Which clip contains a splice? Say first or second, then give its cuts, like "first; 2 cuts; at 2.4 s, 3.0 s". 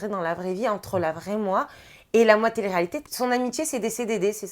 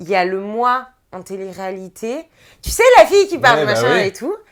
first; 1 cut; at 3.0 s